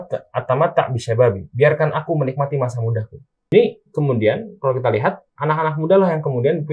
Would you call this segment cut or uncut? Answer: cut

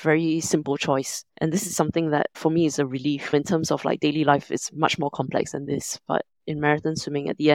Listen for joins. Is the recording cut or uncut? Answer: uncut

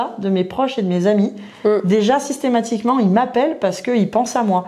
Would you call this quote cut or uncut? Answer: uncut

